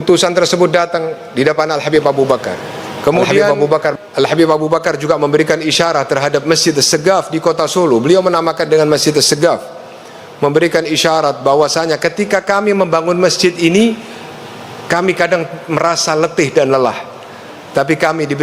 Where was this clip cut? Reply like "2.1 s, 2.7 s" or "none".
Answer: 3.9 s